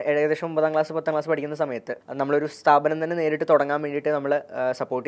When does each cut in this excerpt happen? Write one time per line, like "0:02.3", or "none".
0:01.9